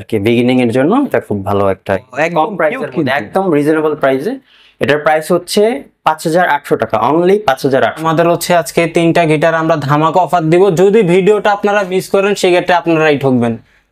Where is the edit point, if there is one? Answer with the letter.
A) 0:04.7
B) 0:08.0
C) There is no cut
B